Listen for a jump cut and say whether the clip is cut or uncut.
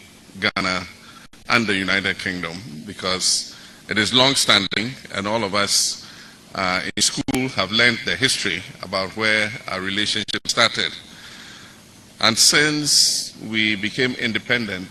uncut